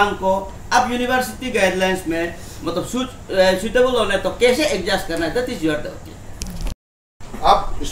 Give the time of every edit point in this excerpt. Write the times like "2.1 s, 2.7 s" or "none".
7.0 s